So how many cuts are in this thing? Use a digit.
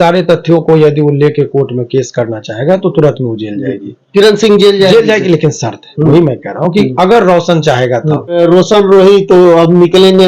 1